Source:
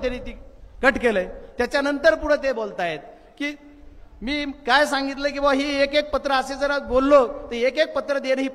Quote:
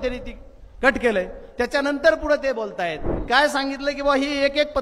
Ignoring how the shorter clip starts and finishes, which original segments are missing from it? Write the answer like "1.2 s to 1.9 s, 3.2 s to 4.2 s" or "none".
3.2 s to 4.6 s